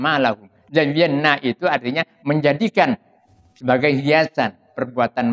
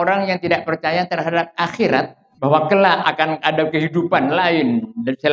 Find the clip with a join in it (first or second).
second